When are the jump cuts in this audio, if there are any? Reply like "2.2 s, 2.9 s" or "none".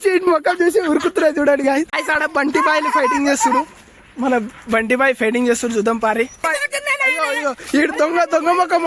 2.0 s, 6.4 s